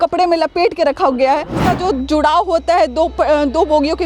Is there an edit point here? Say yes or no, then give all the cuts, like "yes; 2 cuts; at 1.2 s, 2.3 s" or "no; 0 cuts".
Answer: yes; 1 cut; at 1.6 s